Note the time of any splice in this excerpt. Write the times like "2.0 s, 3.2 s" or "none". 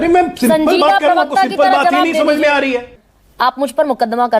3.0 s